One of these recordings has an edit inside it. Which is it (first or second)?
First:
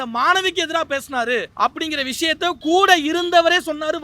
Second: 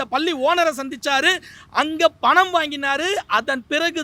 first